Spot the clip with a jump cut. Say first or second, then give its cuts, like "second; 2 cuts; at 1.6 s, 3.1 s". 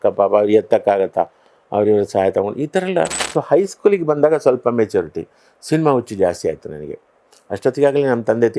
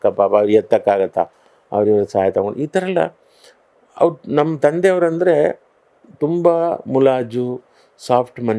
first; 1 cut; at 3.2 s